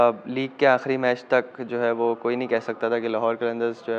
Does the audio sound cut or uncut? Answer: uncut